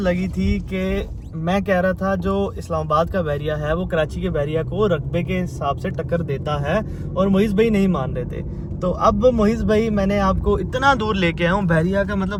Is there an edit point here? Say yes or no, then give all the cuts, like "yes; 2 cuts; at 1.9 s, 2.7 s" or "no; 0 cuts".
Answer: no; 0 cuts